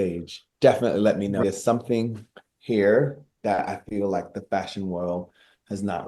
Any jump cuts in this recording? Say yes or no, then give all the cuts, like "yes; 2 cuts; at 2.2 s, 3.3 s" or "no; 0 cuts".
yes; 1 cut; at 1.4 s